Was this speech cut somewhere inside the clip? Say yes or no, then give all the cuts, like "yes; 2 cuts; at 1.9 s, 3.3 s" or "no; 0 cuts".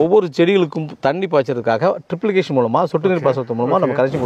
no; 0 cuts